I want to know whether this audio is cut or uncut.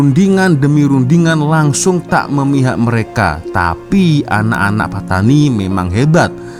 uncut